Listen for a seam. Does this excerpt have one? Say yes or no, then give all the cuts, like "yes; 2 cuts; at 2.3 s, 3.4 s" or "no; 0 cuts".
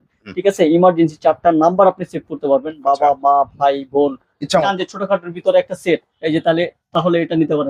yes; 1 cut; at 4.6 s